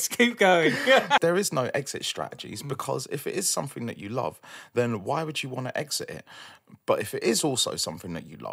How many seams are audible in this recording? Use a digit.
1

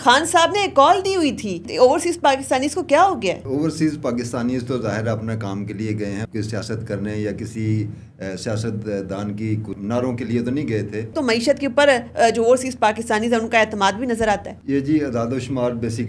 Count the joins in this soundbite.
6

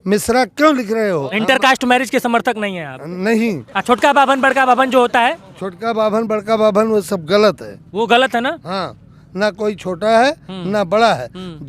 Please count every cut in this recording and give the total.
1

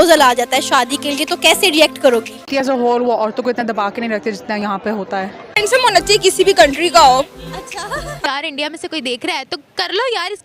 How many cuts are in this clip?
3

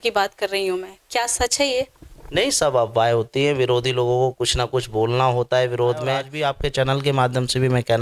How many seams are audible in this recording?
1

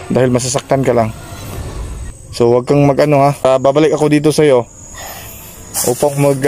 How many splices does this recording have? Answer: 1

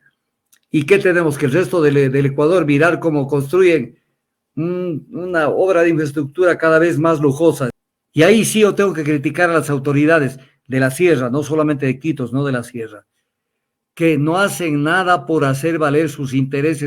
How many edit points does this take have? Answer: 1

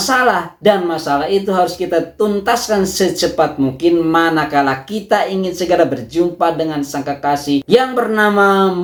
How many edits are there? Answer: 0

